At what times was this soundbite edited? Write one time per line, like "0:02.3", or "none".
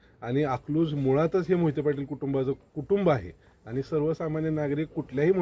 none